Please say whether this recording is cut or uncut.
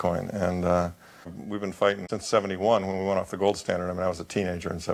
cut